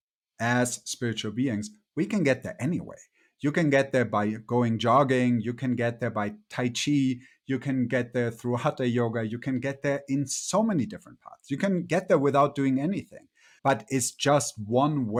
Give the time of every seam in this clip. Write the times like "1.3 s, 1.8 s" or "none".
none